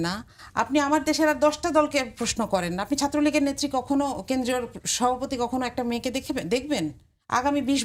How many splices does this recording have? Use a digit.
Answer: 0